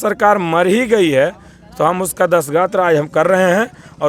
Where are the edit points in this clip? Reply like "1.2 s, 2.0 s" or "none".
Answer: none